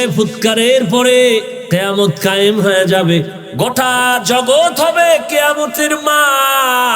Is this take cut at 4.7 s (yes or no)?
no